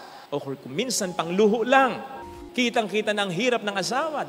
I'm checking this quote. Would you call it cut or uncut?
cut